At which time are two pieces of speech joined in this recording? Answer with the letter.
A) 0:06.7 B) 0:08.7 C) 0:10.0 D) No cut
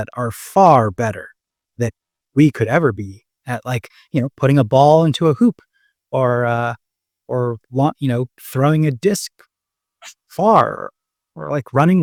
D